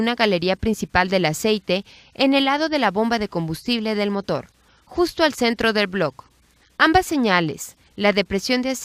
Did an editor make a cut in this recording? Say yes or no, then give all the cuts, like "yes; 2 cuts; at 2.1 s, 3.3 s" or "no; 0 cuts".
no; 0 cuts